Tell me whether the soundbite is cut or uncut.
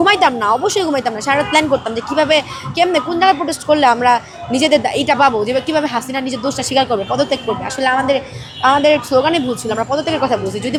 uncut